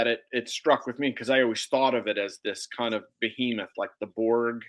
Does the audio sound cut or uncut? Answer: uncut